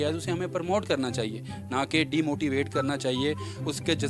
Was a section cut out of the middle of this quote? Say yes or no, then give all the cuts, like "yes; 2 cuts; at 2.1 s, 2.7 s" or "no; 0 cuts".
no; 0 cuts